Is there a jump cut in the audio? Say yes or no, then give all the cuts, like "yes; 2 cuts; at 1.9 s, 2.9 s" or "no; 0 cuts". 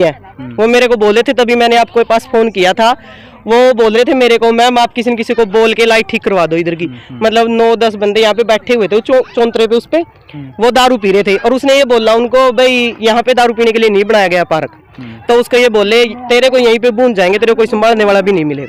no; 0 cuts